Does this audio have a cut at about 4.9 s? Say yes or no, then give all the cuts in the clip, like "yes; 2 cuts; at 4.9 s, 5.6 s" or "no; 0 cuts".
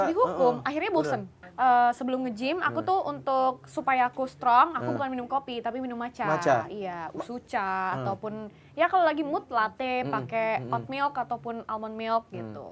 no; 1 cut; at 1.4 s